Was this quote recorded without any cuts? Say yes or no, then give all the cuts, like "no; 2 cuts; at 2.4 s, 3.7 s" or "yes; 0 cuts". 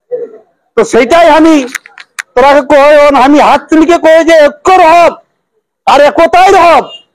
yes; 0 cuts